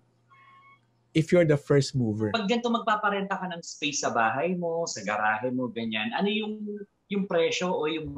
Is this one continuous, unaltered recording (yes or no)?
no